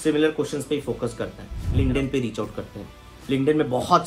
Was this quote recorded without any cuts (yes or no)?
no